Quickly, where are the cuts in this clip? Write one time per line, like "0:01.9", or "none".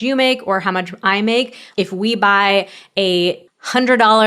0:01.7